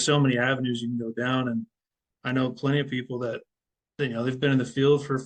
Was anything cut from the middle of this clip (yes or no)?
no